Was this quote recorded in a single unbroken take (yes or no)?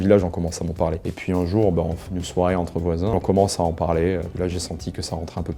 no